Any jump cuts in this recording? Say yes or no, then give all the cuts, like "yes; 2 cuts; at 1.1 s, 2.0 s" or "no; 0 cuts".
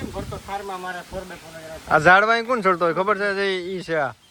no; 0 cuts